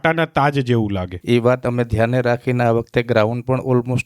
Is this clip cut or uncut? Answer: cut